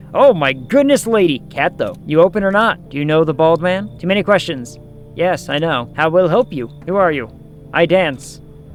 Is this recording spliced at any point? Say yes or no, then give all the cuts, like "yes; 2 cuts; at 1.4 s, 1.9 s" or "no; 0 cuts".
no; 0 cuts